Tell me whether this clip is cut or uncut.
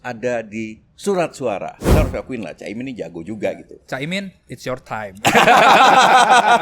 cut